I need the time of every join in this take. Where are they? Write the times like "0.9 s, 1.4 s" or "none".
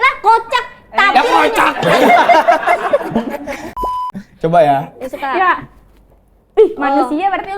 3.7 s